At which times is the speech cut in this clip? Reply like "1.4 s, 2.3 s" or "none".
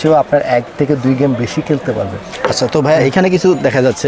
none